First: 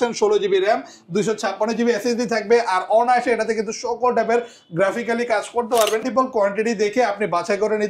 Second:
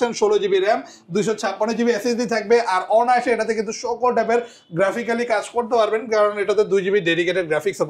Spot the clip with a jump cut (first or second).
first